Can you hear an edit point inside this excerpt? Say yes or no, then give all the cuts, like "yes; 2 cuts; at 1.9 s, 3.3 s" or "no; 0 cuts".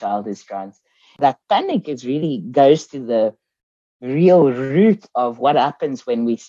yes; 1 cut; at 1.2 s